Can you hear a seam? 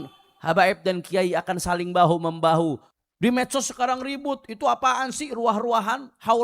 yes; 1 cut; at 2.9 s

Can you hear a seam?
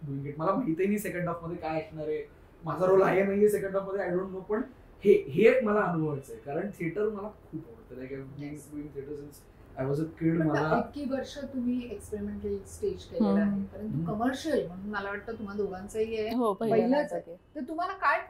no; 0 cuts

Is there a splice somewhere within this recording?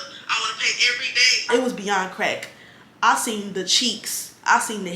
yes; 1 cut; at 1.5 s

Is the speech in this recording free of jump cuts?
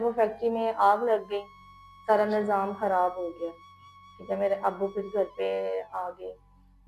yes; 0 cuts

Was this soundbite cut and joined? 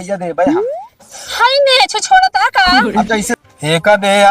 yes; 1 cut; at 3.4 s

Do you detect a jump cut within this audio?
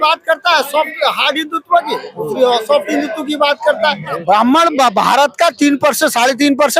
yes; 1 cut; at 4.2 s

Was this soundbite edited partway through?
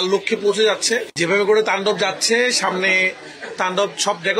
yes; 1 cut; at 1.1 s

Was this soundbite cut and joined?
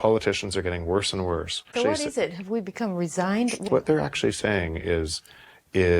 yes; 2 cuts; at 1.7 s, 3.7 s

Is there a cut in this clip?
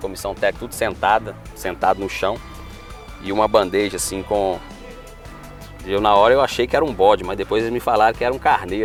no; 0 cuts

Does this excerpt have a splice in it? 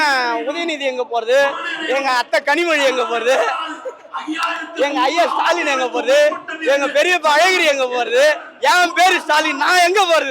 no; 0 cuts

